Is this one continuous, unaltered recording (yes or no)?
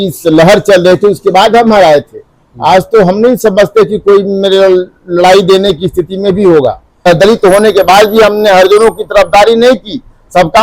no